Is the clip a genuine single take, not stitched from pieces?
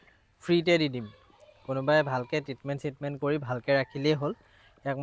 yes; 0 cuts

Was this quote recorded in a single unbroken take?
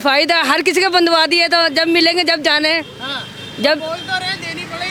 yes; 0 cuts

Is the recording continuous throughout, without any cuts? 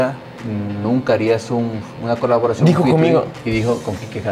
no; 1 cut; at 3.4 s

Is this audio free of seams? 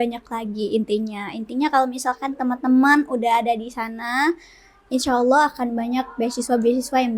yes; 0 cuts

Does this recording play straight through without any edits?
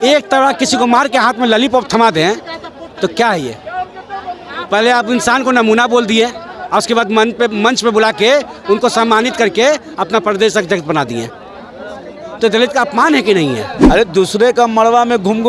no; 1 cut; at 13.7 s

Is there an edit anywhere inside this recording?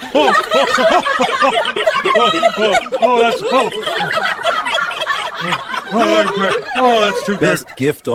no; 0 cuts

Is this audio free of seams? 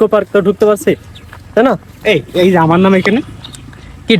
yes; 0 cuts

